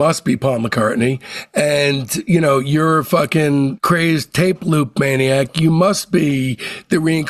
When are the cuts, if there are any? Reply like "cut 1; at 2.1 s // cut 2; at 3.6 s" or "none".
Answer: none